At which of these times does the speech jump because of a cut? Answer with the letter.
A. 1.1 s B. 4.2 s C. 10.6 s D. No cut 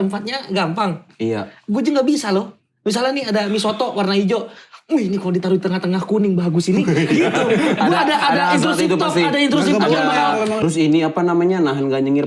C